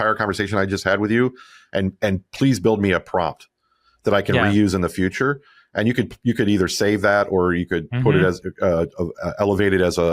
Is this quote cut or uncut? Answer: uncut